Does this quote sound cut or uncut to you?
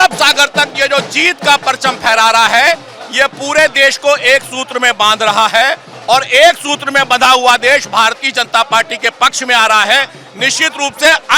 uncut